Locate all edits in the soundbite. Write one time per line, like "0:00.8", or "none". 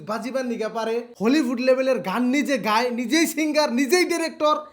0:01.1